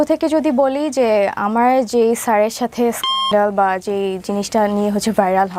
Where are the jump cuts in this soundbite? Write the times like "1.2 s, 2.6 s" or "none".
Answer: none